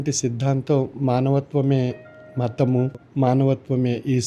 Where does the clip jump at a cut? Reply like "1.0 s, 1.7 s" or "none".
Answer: none